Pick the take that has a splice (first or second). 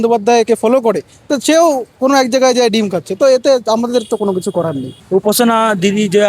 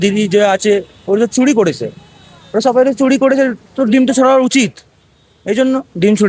first